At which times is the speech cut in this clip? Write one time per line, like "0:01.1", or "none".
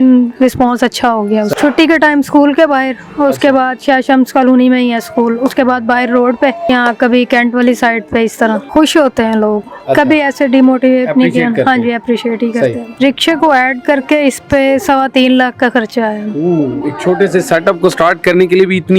0:01.5
0:06.6
0:08.6
0:12.8